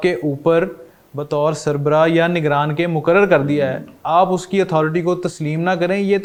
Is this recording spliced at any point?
no; 0 cuts

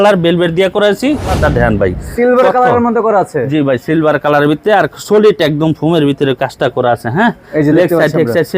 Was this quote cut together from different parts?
yes; 1 cut; at 1.4 s

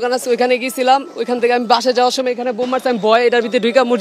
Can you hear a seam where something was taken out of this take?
no; 0 cuts

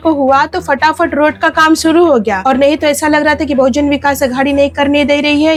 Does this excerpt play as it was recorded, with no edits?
yes; 0 cuts

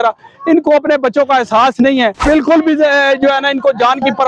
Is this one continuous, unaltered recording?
no; 1 cut; at 2.2 s

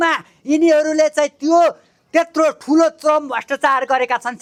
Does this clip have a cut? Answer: no; 0 cuts

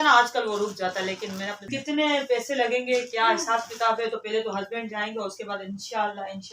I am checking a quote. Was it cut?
yes; 1 cut; at 1.7 s

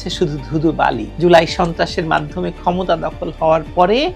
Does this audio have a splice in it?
no; 0 cuts

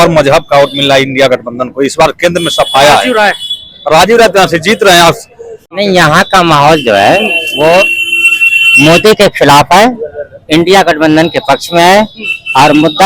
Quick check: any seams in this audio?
yes; 1 cut; at 5.7 s

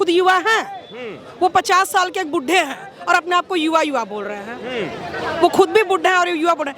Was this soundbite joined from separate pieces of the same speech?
no; 0 cuts

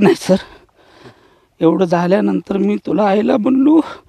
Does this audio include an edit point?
no; 0 cuts

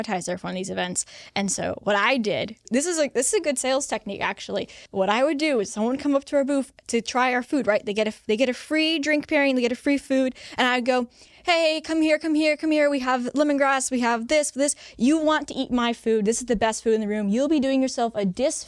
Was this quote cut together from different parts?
yes; 2 cuts; at 2.7 s, 4.8 s

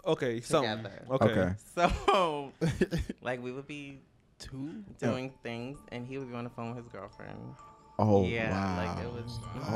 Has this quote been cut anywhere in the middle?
no; 0 cuts

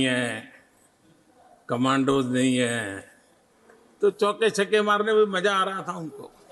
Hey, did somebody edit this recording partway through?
no; 0 cuts

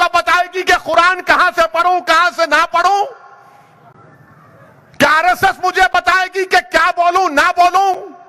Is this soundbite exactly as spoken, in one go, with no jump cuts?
yes; 0 cuts

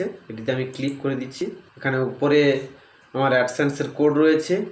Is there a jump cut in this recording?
yes; 1 cut; at 1.3 s

